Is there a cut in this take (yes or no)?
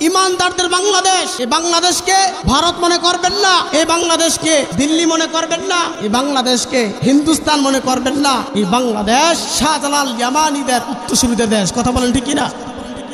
yes